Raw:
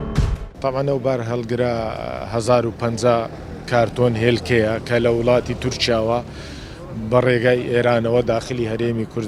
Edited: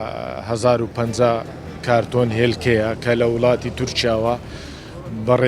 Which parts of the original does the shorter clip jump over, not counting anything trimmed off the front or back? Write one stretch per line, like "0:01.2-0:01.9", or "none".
none